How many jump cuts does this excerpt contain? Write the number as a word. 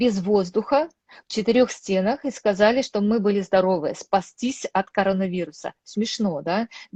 zero